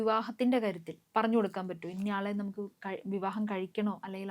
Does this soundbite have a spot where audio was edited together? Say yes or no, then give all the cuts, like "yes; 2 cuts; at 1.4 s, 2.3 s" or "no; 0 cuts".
yes; 1 cut; at 0.9 s